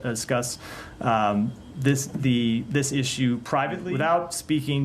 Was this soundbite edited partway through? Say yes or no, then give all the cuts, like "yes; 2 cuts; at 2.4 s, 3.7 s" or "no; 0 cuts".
yes; 1 cut; at 3.9 s